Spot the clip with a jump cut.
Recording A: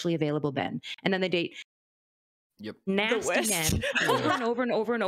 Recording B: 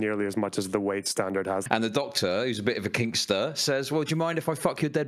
B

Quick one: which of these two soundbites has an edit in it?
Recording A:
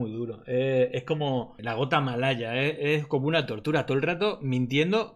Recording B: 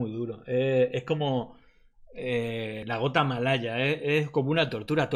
A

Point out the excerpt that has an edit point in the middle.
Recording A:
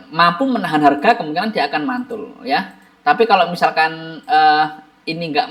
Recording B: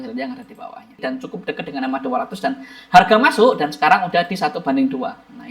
B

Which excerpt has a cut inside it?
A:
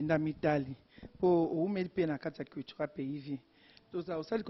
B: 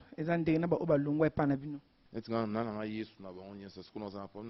B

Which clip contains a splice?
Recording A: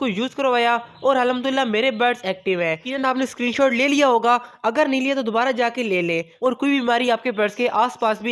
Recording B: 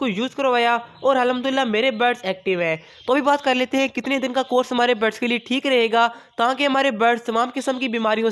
A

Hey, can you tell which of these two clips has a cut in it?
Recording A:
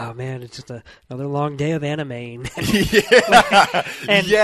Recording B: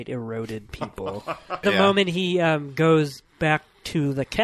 B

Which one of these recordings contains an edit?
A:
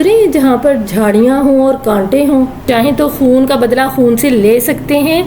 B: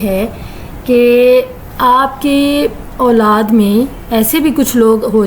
A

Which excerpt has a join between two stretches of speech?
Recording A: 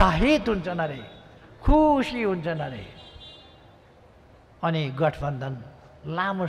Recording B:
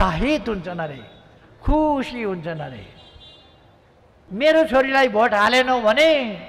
B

